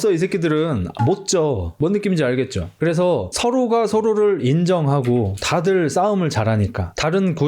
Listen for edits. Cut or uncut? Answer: cut